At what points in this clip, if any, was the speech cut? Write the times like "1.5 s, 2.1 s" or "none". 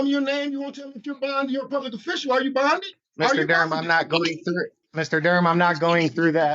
3.0 s, 4.8 s